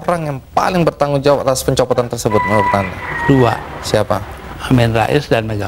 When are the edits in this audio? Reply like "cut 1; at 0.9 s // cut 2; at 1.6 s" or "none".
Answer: none